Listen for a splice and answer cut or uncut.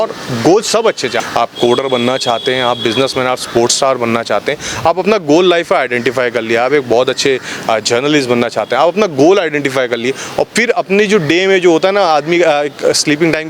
cut